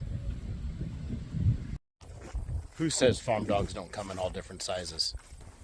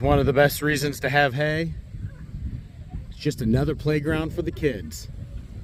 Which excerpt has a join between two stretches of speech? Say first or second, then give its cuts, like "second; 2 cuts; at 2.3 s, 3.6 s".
first; 1 cut; at 1.8 s